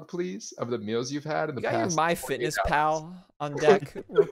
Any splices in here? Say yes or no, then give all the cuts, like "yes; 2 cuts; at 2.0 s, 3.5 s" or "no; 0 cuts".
no; 0 cuts